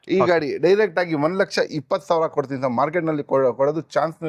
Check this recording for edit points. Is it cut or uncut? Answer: uncut